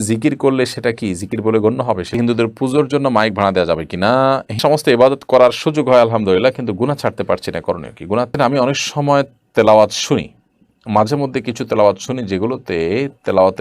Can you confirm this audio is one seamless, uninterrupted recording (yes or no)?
no